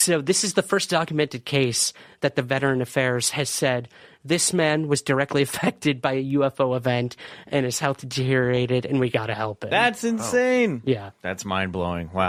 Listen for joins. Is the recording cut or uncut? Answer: uncut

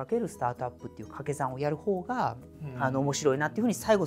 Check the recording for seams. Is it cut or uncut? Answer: uncut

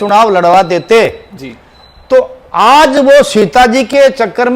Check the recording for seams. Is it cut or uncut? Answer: uncut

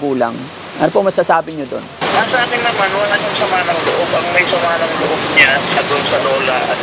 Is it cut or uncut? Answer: cut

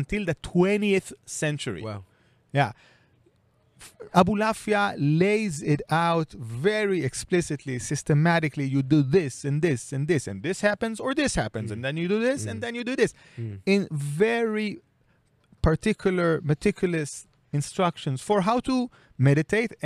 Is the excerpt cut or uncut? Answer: uncut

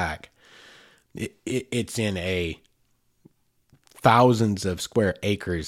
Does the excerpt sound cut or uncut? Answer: uncut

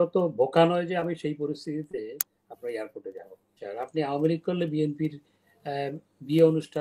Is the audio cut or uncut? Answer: cut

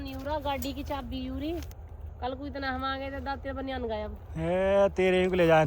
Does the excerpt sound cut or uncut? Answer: cut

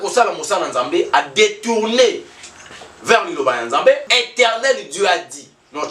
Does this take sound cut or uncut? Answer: cut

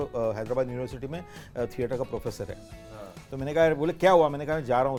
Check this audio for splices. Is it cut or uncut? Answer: uncut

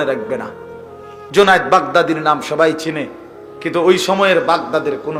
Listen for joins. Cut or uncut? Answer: uncut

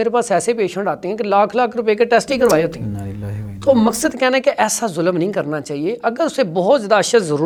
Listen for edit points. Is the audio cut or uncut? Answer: uncut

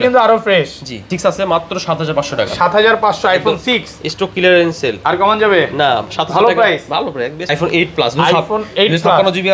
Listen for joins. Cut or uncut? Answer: cut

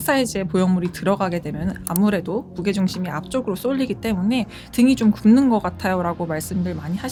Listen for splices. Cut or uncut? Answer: uncut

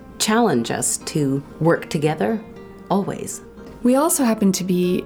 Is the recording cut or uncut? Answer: cut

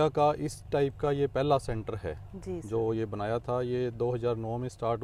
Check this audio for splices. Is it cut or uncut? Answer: uncut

